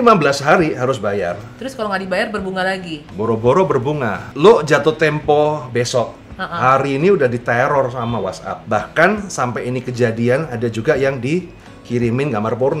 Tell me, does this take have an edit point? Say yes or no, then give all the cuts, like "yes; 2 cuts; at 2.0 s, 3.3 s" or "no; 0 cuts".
yes; 3 cuts; at 3.0 s, 4.2 s, 8.5 s